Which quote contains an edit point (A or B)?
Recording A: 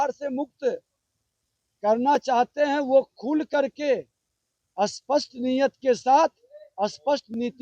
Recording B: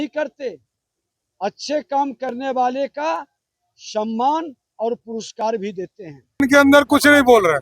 B